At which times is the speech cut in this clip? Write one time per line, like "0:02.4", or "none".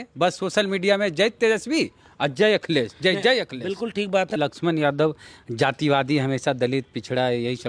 0:04.4